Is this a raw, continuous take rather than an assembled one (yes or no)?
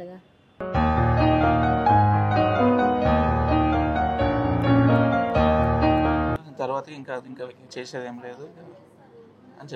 no